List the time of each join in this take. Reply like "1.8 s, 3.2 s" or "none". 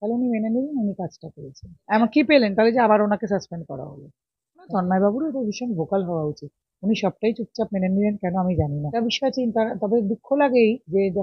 1.7 s, 4.7 s, 8.9 s

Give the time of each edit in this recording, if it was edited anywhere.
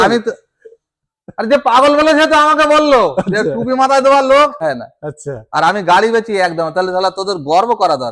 4.6 s

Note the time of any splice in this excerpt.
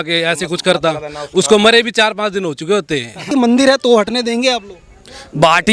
3.3 s

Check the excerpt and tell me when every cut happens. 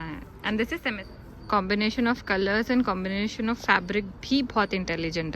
0.9 s

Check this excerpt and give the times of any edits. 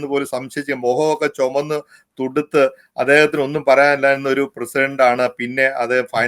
none

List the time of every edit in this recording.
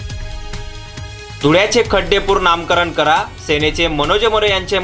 0.9 s

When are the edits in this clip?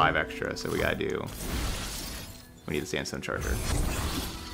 none

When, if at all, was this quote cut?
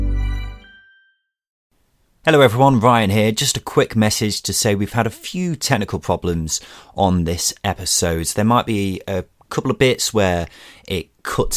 1.6 s

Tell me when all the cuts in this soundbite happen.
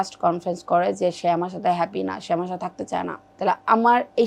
3.2 s

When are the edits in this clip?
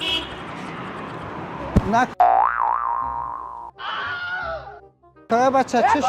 2.1 s

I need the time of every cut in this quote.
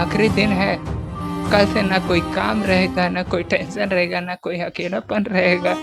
none

